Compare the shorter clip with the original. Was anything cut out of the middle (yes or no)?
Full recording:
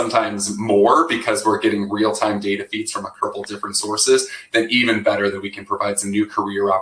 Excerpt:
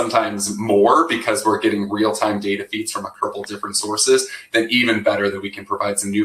no